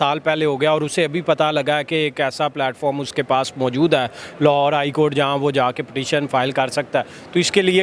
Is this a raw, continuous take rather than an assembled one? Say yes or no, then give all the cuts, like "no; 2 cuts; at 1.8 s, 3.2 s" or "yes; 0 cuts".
yes; 0 cuts